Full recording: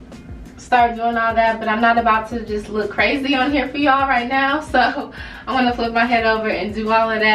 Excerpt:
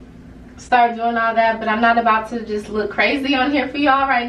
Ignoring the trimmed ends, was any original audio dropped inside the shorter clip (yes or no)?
no